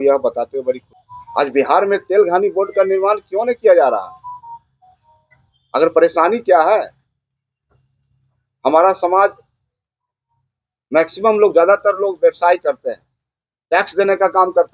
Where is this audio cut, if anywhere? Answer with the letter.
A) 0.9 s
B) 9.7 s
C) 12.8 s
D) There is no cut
A